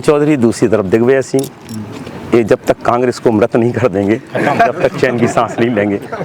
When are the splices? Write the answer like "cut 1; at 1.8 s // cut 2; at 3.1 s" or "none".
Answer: none